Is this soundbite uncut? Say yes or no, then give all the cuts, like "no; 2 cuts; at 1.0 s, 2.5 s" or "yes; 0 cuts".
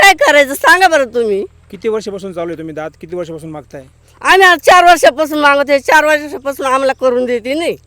yes; 0 cuts